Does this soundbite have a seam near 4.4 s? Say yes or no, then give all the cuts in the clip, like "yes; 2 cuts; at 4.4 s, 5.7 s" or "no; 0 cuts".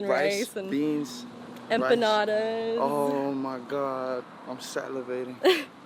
no; 0 cuts